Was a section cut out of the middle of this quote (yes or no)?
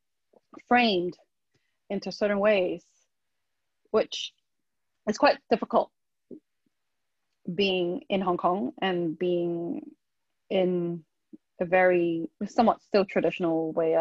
no